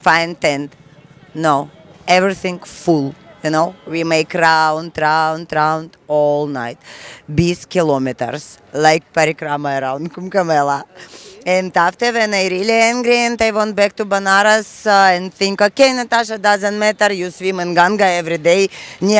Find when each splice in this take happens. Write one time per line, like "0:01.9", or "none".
none